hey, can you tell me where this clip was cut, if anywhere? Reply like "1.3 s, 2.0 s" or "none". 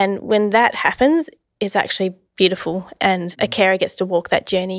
3.3 s